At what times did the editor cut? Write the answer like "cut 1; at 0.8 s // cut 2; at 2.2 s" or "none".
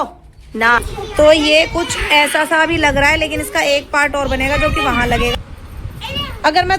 cut 1; at 1.0 s // cut 2; at 5.3 s